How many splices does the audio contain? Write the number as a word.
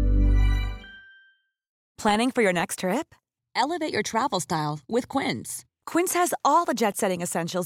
zero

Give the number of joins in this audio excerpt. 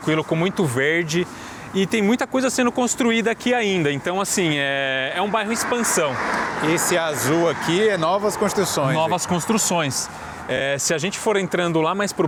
zero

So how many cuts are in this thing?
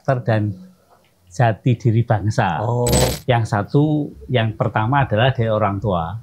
one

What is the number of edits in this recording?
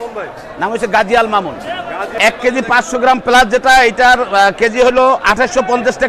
one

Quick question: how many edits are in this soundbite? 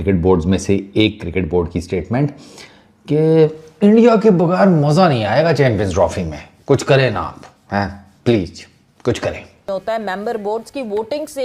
one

